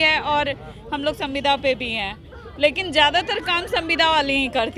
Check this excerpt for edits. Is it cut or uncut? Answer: uncut